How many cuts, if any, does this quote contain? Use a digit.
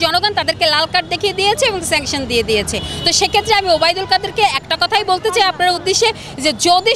0